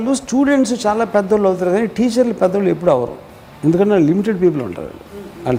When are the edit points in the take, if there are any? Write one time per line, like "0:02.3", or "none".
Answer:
none